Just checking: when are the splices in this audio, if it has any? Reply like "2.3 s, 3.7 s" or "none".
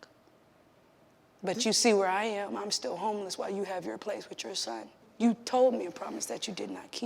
1.4 s, 5.0 s

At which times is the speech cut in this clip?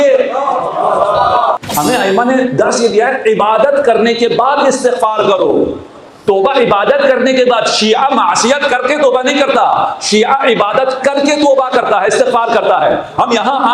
1.6 s

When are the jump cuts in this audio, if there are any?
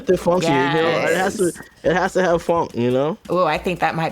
3.2 s

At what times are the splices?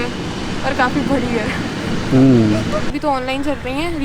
2.9 s

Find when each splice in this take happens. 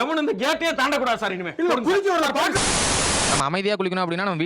3.1 s

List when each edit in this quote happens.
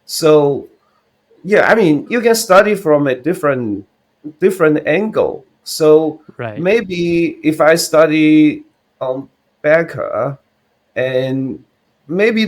2.0 s

